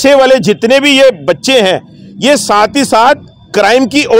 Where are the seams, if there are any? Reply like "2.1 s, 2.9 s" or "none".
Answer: none